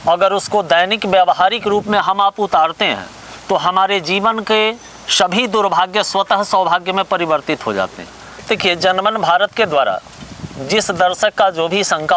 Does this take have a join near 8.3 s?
yes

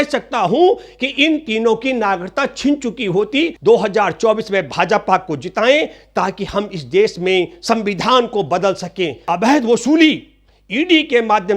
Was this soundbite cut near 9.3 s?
yes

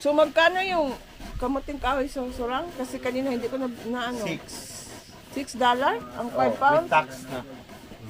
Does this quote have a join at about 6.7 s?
no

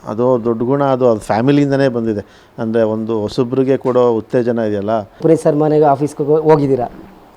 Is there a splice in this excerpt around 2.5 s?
no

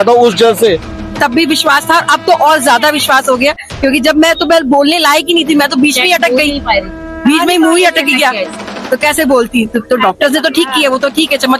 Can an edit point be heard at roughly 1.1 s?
yes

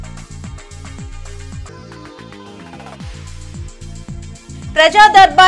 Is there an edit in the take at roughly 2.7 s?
no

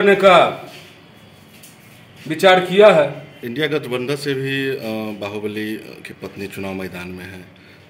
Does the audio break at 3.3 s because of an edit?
yes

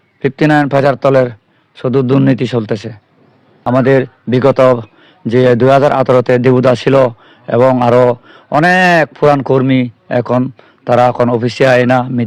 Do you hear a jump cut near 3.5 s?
yes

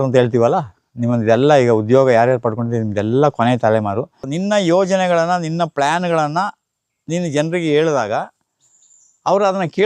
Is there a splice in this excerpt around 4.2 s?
yes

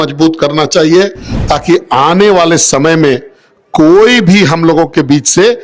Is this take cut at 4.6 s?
no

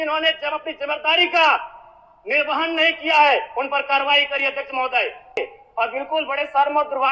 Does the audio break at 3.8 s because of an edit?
no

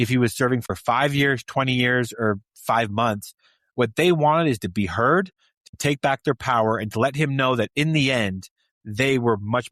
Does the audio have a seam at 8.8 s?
no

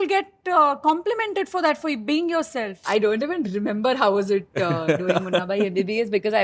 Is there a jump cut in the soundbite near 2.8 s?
yes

